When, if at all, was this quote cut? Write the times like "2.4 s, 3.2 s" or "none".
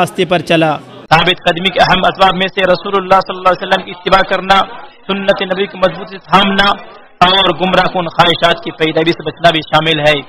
0.9 s